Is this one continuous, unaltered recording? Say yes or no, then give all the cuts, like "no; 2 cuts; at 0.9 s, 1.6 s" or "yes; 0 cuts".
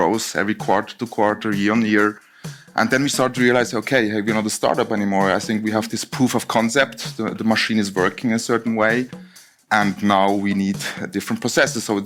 yes; 0 cuts